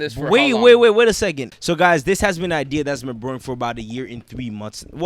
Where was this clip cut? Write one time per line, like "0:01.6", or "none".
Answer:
0:01.5